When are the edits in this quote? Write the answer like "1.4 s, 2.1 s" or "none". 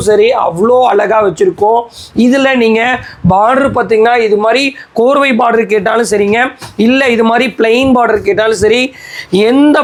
none

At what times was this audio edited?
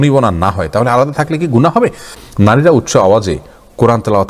1.8 s

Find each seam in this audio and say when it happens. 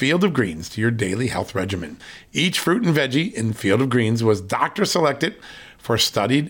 none

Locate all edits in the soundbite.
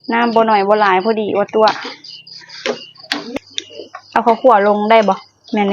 3.3 s

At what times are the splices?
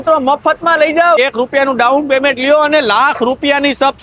1.2 s

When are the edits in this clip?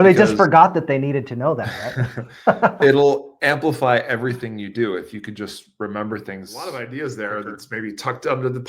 6.5 s

